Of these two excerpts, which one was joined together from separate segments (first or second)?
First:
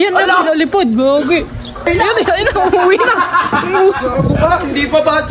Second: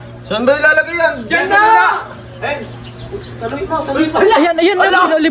first